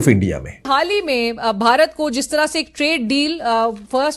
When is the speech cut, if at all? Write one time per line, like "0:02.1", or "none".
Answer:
0:01.0